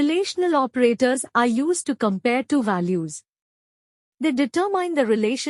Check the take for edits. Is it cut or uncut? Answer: uncut